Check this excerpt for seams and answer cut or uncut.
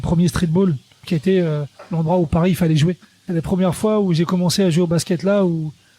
cut